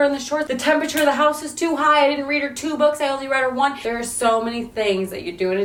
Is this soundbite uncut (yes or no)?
yes